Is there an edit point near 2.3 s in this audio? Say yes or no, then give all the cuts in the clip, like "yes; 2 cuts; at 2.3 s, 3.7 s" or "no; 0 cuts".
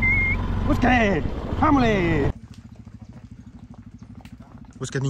yes; 1 cut; at 2.3 s